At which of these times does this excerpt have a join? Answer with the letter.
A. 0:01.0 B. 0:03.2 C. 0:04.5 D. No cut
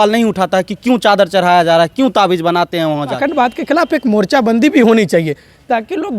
B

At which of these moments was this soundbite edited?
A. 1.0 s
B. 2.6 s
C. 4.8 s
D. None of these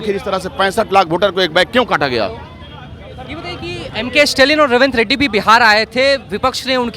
D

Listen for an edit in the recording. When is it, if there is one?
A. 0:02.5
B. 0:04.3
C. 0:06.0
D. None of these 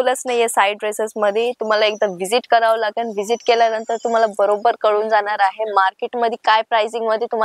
D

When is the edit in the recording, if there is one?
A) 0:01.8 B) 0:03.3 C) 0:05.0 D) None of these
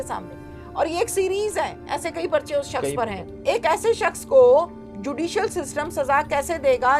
B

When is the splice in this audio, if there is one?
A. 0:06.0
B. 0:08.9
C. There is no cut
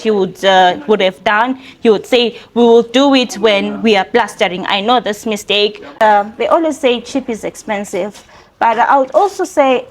A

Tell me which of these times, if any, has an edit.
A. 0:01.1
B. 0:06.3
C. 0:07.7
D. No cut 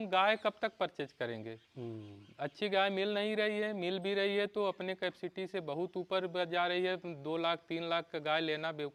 D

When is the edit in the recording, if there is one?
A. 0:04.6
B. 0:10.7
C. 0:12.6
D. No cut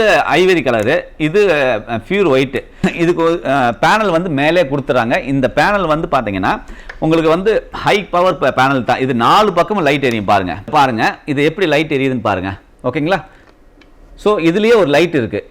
B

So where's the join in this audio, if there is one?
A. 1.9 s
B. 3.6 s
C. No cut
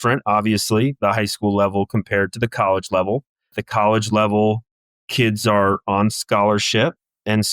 B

